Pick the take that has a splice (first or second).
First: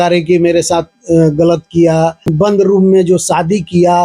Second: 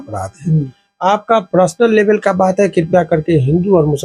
first